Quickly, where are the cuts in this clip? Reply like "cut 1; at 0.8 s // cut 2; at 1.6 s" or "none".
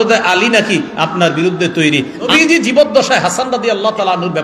cut 1; at 2.3 s